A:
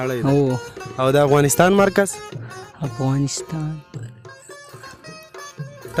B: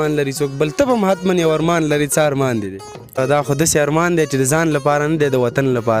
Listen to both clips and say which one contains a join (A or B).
B